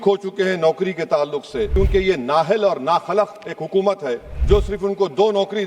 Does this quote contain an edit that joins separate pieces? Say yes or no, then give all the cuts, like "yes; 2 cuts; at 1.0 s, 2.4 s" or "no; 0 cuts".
yes; 2 cuts; at 1.7 s, 4.3 s